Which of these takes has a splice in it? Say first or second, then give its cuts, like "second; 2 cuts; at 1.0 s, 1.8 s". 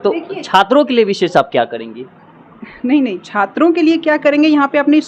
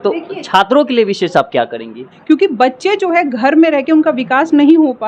second; 1 cut; at 2.1 s